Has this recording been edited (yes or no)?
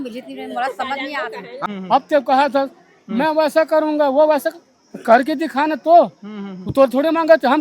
yes